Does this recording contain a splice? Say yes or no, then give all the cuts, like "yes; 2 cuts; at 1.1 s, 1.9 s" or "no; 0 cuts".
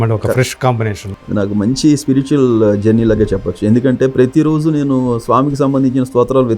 yes; 1 cut; at 1.0 s